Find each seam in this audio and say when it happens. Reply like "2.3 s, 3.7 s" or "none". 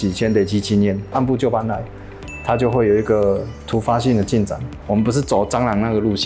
1.1 s, 4.8 s